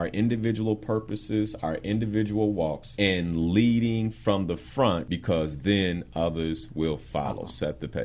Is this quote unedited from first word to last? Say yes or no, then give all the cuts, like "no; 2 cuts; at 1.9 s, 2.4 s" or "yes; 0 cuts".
no; 2 cuts; at 2.8 s, 5.1 s